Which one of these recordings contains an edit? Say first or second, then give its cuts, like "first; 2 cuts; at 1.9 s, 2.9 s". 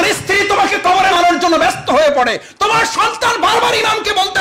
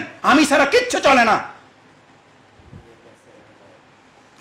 first; 1 cut; at 1.1 s